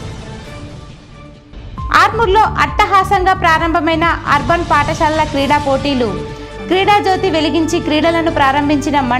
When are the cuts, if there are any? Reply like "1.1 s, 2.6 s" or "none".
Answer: none